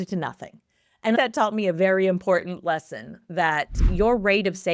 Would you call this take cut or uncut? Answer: cut